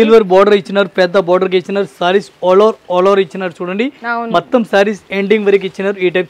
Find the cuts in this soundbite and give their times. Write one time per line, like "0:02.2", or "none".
none